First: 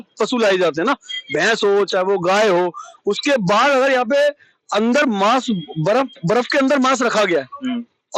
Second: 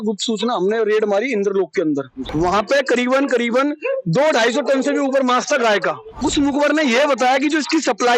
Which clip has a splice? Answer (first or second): second